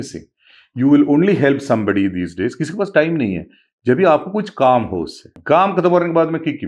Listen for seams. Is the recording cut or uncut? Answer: cut